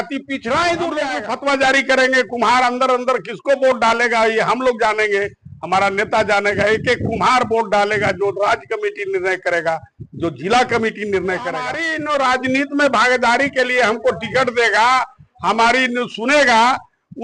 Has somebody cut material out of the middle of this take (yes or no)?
yes